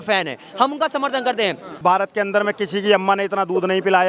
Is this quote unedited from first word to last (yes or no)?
no